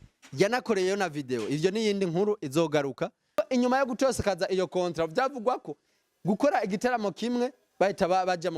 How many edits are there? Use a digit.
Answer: 1